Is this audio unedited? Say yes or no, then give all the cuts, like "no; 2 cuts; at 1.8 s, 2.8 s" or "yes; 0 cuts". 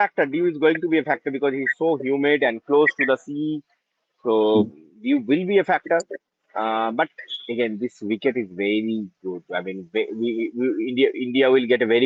yes; 0 cuts